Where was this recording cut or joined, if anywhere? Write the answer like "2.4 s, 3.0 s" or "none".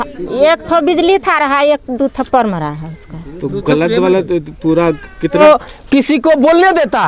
5.4 s